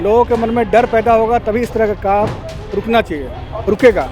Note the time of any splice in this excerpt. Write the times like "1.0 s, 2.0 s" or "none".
none